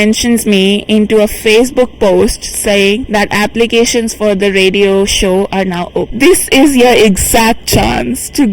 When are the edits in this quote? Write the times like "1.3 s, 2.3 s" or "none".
3.0 s, 6.0 s

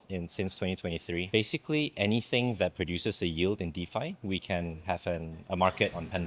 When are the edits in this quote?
1.3 s

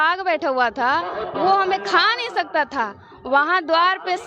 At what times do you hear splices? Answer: none

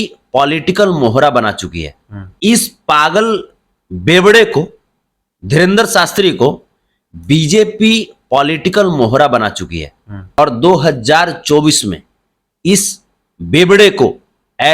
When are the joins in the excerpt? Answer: 2.3 s, 10.4 s

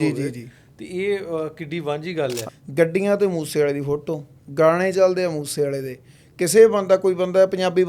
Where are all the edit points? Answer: 2.5 s

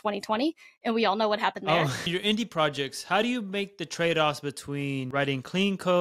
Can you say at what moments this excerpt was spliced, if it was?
2.1 s, 5.1 s

